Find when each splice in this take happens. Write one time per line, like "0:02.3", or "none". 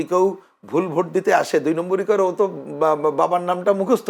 none